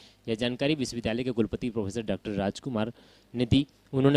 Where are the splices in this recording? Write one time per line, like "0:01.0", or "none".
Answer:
0:01.0
0:02.8